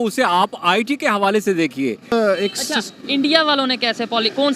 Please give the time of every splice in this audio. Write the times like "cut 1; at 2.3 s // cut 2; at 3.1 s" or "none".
cut 1; at 2.1 s